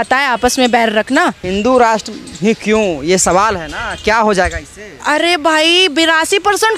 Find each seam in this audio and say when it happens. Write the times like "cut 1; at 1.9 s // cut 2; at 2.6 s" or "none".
cut 1; at 1.4 s